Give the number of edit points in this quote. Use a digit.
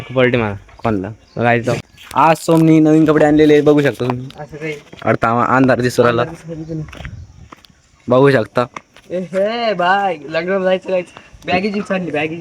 1